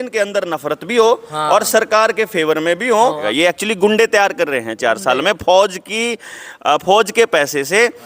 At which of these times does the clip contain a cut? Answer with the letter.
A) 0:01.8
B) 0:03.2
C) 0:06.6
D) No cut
B